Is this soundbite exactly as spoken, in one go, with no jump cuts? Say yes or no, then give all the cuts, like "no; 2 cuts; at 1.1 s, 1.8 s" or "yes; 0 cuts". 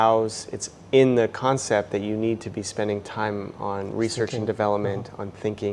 yes; 0 cuts